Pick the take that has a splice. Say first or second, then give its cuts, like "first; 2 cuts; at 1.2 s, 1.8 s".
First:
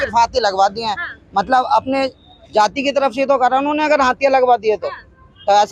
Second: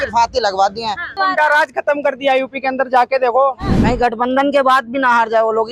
second; 2 cuts; at 1.2 s, 3.7 s